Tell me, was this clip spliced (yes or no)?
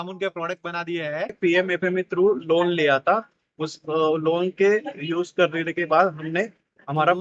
yes